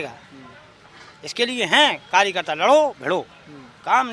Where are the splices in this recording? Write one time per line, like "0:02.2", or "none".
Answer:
none